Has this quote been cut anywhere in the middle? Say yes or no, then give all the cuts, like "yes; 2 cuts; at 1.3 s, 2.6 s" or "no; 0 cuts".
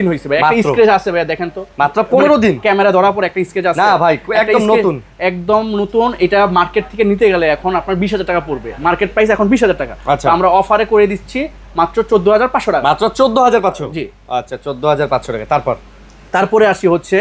no; 0 cuts